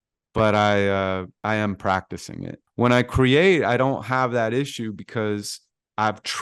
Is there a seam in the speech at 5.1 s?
no; 2 cuts; at 1.3 s, 2.6 s

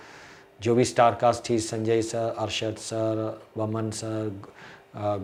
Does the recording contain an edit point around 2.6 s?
no; 0 cuts

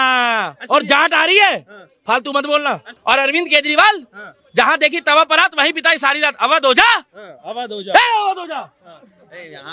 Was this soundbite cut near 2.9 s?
yes; 1 cut; at 2.9 s

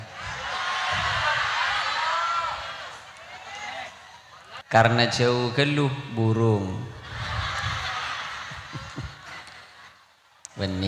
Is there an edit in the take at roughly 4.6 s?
yes; 1 cut; at 4.6 s

